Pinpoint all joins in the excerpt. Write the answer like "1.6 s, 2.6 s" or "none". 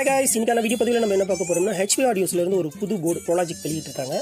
none